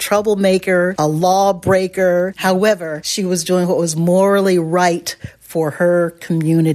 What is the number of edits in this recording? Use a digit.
2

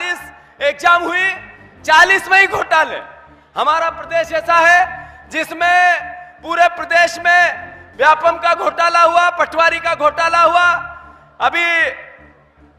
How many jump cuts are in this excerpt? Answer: 0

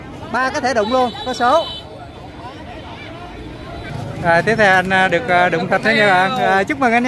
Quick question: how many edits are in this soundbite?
1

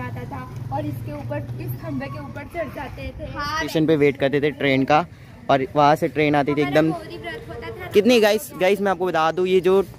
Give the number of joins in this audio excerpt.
1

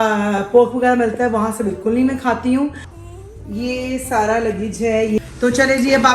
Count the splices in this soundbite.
2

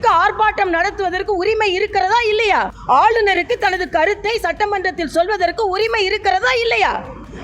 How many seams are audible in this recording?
1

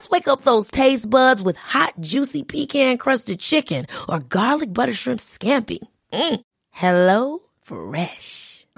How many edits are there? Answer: 0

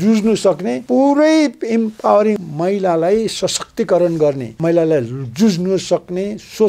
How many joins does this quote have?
3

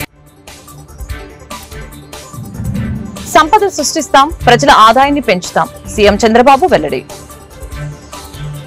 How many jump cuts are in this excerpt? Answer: 1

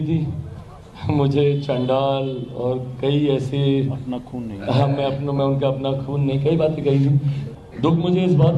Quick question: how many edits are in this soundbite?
1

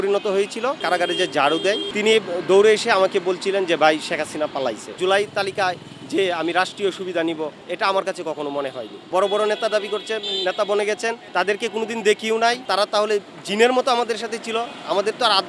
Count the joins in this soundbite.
5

